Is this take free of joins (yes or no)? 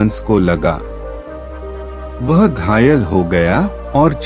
no